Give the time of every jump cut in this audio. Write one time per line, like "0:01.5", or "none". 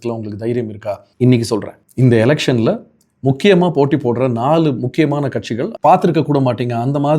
0:01.1
0:01.8
0:05.6